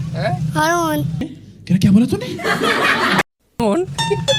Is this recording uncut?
yes; 0 cuts

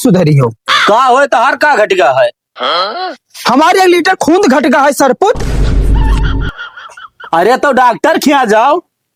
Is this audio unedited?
yes; 0 cuts

